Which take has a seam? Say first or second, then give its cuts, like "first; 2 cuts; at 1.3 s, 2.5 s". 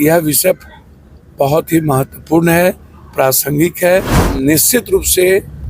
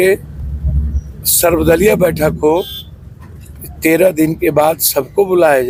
first; 1 cut; at 4.2 s